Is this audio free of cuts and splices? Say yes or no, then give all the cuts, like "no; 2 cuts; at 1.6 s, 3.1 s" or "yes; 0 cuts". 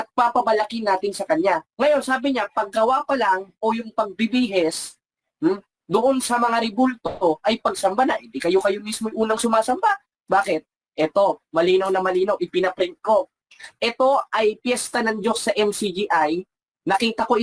yes; 0 cuts